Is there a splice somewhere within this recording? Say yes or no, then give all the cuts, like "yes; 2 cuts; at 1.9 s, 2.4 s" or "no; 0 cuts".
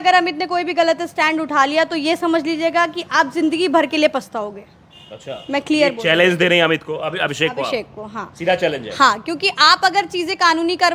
no; 0 cuts